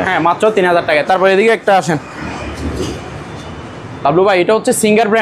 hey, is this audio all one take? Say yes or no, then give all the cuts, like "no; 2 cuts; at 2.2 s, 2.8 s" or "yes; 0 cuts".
yes; 0 cuts